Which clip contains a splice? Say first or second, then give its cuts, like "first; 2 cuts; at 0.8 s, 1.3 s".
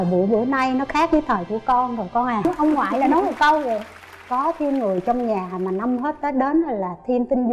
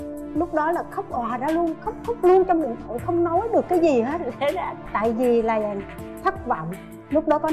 first; 1 cut; at 2.4 s